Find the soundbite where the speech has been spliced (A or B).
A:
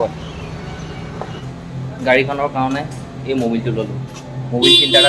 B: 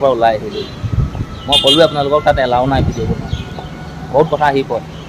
A